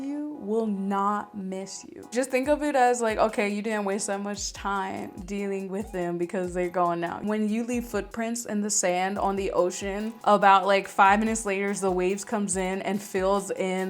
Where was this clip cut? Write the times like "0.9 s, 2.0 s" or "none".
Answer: 7.2 s